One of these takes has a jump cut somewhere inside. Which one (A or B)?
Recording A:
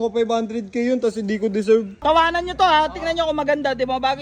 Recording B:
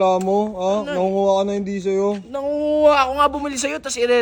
A